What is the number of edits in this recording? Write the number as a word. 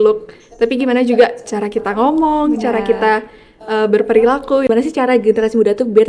one